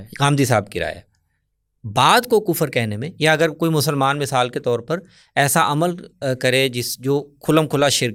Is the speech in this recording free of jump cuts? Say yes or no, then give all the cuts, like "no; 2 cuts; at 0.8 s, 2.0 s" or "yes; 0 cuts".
yes; 0 cuts